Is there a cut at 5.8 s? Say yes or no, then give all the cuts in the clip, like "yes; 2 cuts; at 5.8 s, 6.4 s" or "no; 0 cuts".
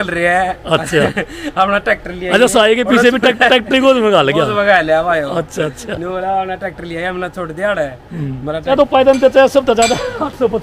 no; 1 cut; at 8.6 s